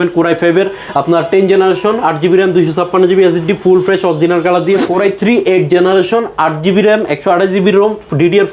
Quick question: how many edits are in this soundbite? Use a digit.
1